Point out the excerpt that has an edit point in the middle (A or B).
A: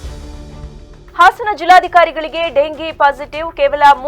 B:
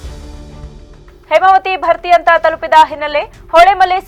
A